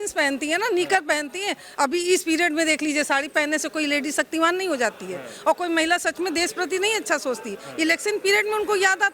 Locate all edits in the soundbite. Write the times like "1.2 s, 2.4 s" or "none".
none